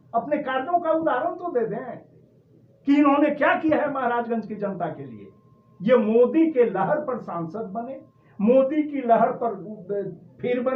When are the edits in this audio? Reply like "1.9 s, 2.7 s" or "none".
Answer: none